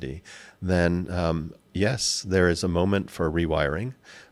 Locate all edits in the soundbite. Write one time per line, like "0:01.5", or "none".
none